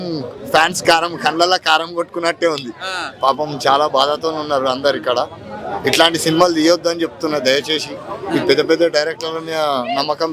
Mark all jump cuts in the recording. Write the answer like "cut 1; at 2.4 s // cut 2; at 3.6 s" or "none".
none